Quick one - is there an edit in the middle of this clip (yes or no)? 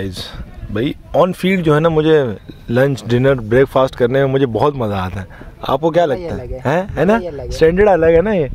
no